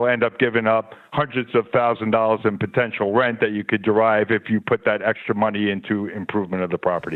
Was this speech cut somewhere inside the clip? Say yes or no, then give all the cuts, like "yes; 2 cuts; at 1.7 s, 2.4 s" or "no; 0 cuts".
no; 0 cuts